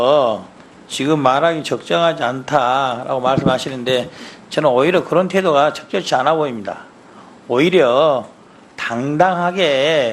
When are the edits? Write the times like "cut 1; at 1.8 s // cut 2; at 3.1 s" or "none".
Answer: cut 1; at 1.8 s